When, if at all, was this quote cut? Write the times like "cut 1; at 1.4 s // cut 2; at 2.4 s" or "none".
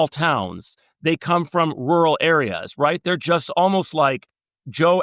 none